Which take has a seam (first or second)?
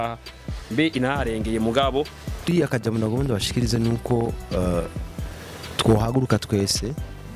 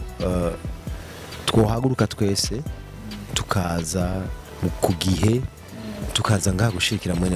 first